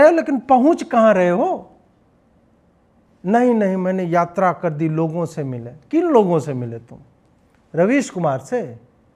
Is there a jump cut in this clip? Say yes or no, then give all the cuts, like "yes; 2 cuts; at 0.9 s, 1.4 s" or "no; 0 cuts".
no; 0 cuts